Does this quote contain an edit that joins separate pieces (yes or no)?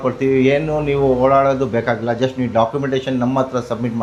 no